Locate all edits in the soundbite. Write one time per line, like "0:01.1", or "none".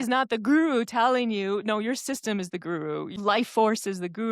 0:03.1